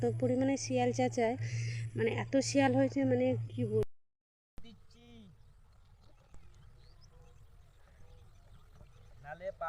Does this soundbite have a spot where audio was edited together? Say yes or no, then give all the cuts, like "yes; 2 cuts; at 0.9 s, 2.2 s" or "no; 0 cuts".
yes; 1 cut; at 3.8 s